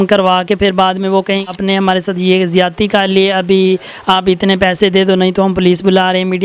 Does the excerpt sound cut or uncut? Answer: cut